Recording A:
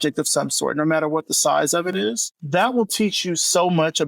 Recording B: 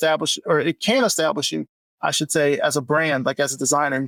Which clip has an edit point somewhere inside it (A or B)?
A